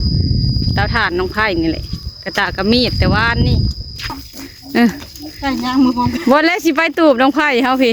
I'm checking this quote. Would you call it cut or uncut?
cut